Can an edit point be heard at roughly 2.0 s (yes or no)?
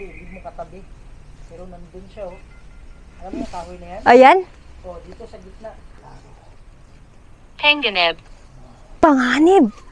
no